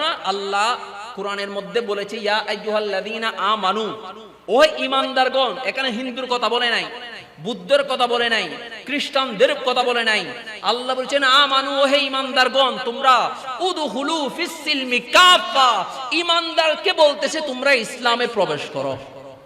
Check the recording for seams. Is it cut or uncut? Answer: uncut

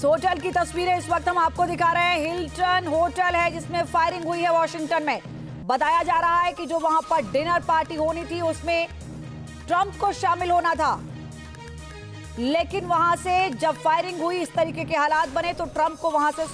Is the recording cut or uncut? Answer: uncut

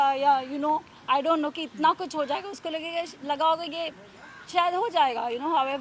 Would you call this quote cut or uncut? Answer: uncut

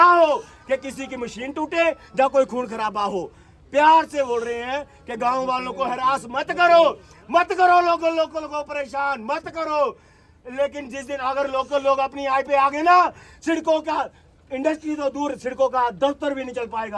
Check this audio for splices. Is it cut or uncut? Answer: uncut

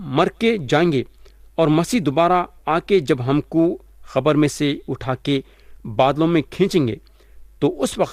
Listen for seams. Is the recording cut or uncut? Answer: uncut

